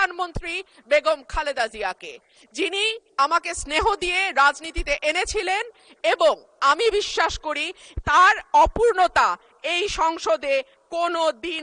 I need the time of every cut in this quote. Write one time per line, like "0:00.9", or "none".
none